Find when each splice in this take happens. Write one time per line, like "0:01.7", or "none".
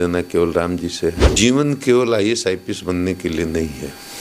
0:01.3